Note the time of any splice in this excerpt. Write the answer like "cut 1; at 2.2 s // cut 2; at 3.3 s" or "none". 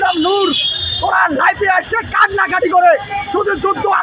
none